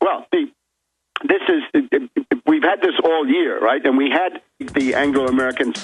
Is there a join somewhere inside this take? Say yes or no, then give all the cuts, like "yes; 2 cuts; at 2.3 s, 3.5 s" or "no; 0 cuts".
no; 0 cuts